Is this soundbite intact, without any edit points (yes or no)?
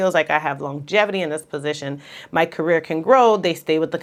yes